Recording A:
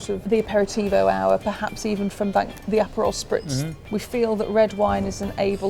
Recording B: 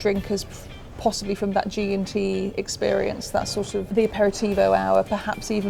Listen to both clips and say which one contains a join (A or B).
A